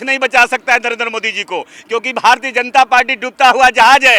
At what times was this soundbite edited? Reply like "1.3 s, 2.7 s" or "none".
none